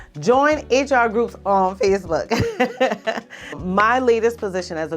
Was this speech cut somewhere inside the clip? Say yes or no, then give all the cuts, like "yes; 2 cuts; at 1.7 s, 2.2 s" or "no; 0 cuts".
yes; 1 cut; at 3.5 s